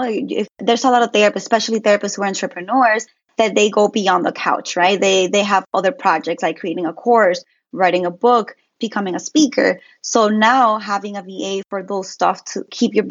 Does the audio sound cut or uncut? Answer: uncut